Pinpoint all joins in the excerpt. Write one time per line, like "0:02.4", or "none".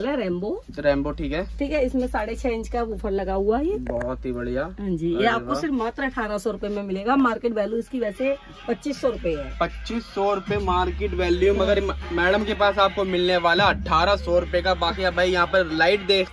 none